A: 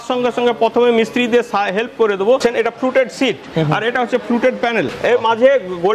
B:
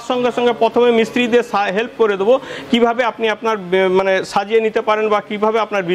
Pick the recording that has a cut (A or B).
A